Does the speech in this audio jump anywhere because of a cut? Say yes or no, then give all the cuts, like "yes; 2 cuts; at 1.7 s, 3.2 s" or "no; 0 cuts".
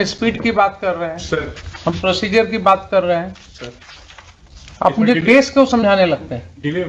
no; 0 cuts